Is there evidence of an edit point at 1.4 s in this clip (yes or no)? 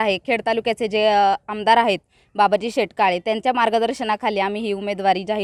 no